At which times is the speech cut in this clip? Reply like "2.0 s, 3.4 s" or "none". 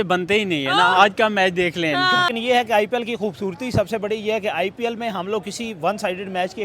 2.3 s